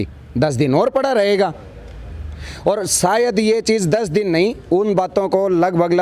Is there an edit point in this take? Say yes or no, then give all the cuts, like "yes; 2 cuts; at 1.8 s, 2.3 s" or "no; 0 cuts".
no; 0 cuts